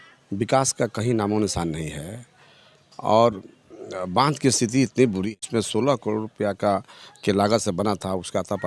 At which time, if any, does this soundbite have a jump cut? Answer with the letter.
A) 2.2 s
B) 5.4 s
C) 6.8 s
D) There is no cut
B